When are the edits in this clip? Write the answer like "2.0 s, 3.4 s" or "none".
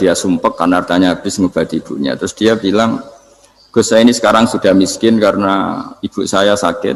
none